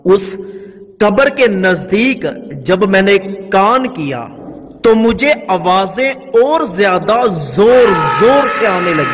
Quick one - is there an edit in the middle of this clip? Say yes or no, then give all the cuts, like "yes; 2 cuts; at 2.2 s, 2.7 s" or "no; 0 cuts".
no; 0 cuts